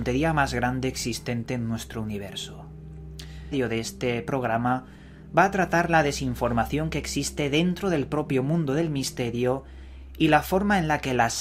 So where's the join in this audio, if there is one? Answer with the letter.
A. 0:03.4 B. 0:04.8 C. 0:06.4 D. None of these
D